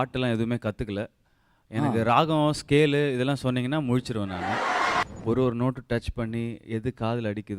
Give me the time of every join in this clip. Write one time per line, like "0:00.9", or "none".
0:05.0